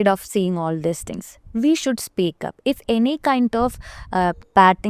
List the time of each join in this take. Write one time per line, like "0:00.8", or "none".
none

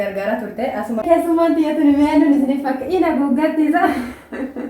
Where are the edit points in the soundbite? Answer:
0:01.0

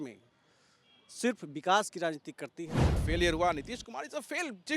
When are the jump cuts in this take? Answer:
0:03.0

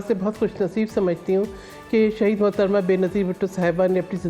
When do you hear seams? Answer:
none

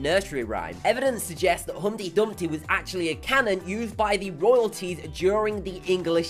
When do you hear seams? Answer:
none

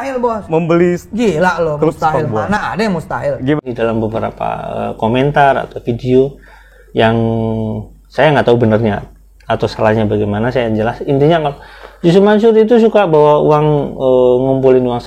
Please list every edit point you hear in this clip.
0:03.8

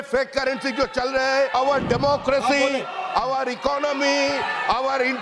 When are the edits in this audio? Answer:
0:01.5

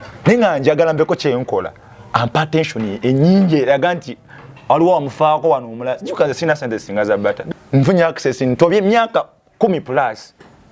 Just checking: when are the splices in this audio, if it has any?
0:07.4

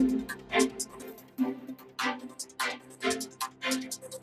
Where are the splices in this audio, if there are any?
none

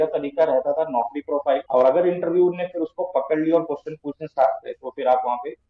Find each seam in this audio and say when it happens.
0:01.6

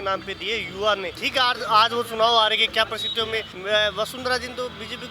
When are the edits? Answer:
0:01.2
0:03.5

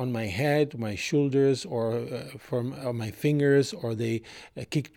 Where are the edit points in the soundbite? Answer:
none

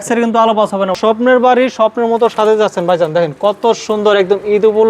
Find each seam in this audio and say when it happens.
0:00.9

